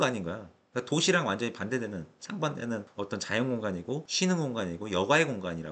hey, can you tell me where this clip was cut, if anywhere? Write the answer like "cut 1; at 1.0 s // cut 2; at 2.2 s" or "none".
none